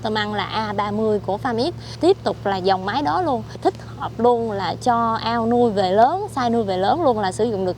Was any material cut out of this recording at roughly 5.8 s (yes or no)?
no